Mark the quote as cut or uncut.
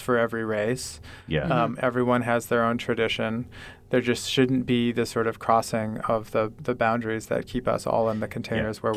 uncut